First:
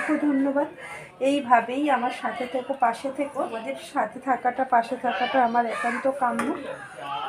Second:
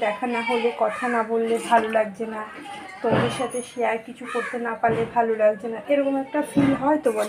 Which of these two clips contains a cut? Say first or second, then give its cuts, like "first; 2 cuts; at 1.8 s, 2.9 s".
first; 1 cut; at 3.6 s